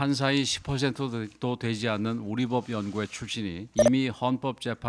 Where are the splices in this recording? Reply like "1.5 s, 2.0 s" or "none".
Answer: 3.6 s

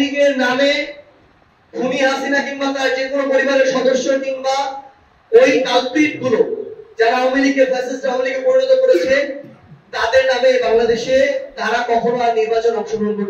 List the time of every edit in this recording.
none

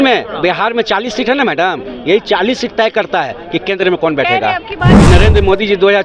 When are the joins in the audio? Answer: 4.9 s

